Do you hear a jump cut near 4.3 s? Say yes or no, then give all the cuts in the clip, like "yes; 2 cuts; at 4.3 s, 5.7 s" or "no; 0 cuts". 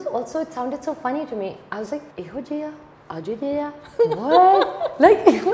no; 2 cuts; at 2.1 s, 2.9 s